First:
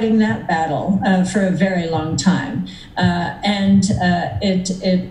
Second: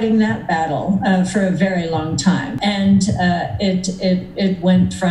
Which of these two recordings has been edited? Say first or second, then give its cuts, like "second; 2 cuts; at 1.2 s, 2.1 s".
second; 1 cut; at 2.5 s